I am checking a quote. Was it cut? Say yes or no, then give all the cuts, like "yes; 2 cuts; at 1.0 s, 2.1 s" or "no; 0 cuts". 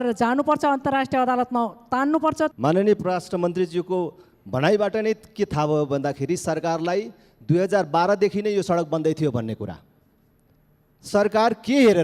yes; 1 cut; at 2.5 s